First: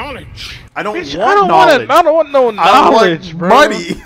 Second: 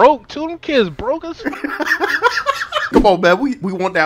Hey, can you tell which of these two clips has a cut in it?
second; 1 cut; at 2.9 s

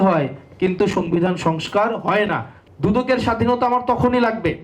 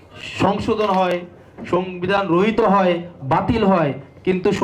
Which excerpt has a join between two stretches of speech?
first; 1 cut; at 2.5 s

